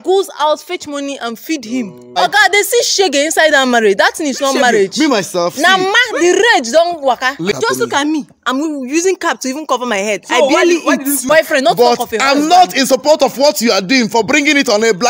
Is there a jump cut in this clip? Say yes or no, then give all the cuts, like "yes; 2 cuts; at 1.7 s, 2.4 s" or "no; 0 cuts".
yes; 3 cuts; at 2.2 s, 7.5 s, 11.3 s